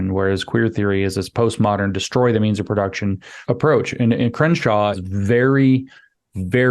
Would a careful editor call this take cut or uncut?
cut